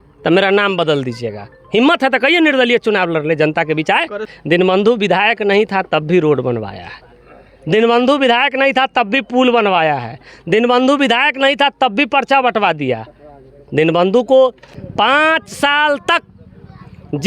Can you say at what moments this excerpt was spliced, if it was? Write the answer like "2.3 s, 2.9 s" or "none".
4.3 s, 14.7 s